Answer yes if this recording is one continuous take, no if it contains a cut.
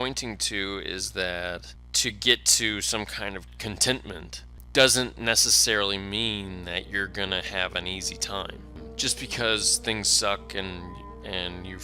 no